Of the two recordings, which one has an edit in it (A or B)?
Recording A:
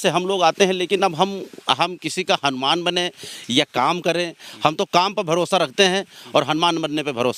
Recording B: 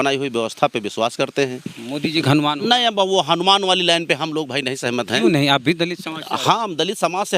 B